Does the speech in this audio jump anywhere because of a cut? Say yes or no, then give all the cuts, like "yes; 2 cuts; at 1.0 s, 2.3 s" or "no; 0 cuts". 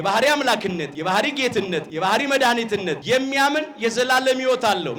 yes; 3 cuts; at 0.9 s, 1.9 s, 3.0 s